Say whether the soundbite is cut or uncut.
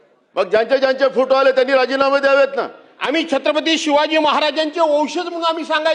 cut